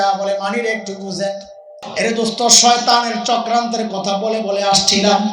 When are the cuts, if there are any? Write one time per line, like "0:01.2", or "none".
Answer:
0:01.8